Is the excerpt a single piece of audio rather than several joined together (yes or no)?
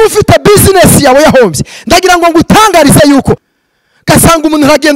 no